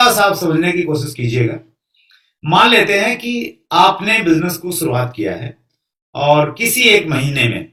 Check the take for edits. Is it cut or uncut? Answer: uncut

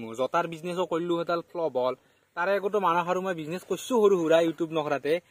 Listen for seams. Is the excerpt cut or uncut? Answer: uncut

